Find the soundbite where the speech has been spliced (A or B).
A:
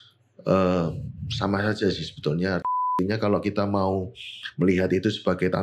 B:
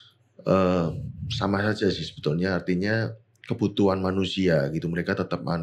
A